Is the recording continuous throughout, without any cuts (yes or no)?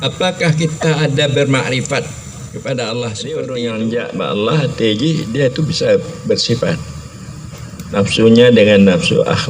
no